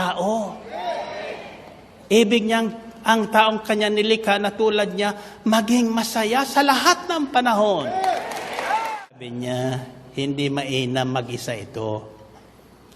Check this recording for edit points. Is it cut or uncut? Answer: cut